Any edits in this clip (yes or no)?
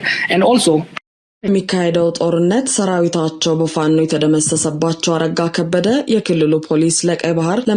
yes